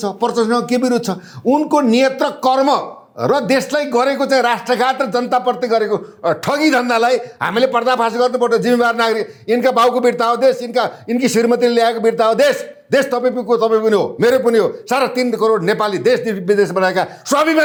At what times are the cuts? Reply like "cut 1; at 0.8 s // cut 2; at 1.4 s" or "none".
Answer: none